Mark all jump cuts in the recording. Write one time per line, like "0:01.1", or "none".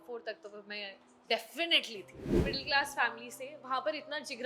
0:02.5